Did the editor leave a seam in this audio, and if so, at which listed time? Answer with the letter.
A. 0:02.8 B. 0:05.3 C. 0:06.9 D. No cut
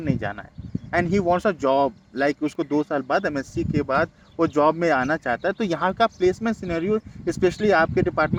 D